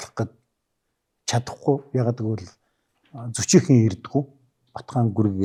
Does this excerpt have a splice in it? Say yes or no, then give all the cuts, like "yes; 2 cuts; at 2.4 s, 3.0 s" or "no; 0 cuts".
no; 0 cuts